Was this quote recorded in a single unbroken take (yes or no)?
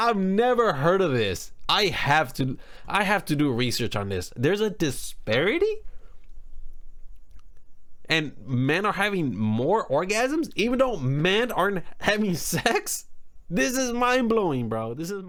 yes